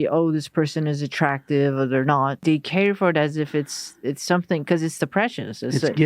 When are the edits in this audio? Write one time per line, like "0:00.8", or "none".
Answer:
0:02.4